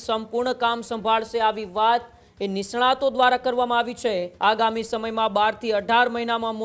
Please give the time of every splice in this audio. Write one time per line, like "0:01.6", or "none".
0:04.3